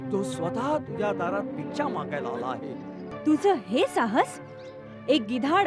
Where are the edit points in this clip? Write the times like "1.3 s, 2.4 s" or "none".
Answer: 3.1 s

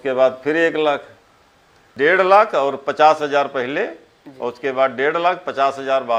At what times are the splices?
none

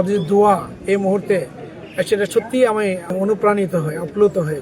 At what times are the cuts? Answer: 3.1 s

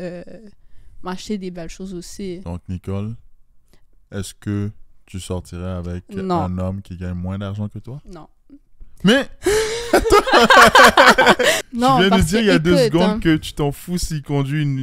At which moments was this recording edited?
2.4 s, 11.6 s

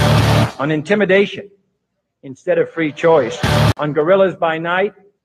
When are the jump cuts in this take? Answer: 3.7 s

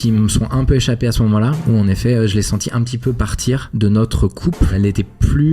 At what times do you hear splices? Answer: 3.7 s, 4.7 s

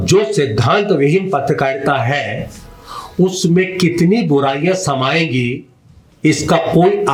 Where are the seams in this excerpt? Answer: none

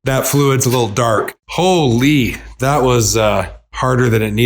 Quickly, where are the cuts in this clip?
1.4 s

